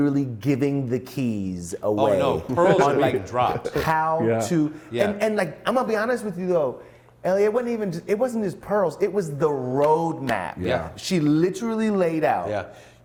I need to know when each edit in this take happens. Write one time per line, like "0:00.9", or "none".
none